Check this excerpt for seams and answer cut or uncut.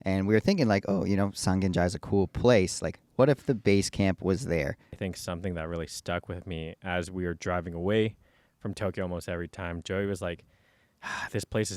cut